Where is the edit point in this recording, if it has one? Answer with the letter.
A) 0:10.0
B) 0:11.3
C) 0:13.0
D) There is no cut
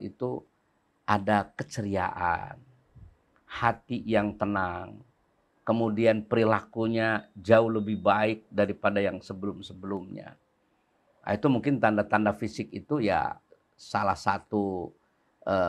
D